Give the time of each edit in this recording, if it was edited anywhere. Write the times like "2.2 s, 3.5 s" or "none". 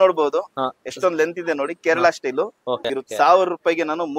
2.9 s